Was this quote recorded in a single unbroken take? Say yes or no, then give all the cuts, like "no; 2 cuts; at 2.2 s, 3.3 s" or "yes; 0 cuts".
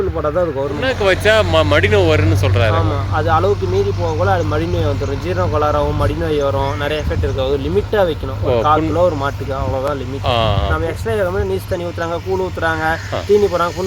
yes; 0 cuts